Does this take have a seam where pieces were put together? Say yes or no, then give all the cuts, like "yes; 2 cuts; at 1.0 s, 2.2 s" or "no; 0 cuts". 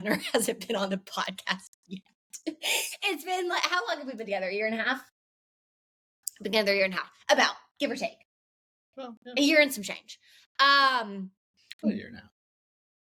no; 0 cuts